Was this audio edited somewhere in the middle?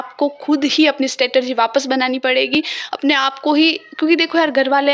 no; 0 cuts

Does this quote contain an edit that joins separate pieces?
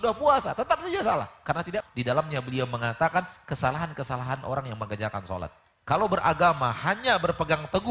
yes; 2 cuts; at 1.9 s, 5.7 s

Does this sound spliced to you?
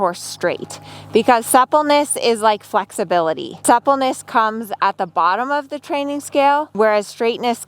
yes; 2 cuts; at 3.6 s, 6.7 s

